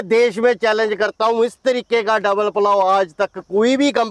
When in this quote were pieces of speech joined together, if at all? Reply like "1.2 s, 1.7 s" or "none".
none